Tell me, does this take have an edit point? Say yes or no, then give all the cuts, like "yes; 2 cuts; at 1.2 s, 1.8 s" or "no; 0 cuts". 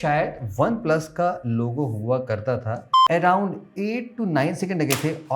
yes; 1 cut; at 2.9 s